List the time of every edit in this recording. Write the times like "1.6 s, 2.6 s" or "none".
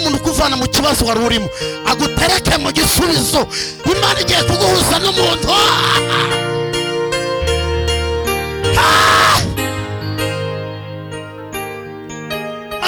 none